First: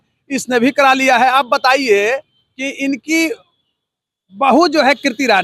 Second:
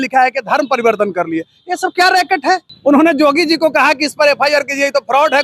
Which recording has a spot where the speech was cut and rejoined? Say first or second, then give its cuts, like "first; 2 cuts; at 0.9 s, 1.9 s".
second; 1 cut; at 2.7 s